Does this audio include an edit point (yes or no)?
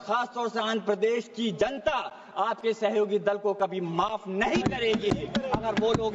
no